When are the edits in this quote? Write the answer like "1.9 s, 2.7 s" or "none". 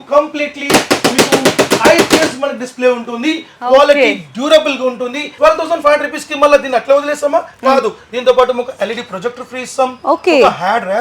5.3 s